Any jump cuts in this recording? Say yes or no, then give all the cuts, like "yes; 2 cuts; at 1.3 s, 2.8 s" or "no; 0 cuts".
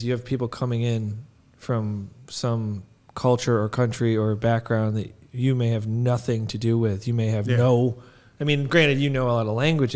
no; 0 cuts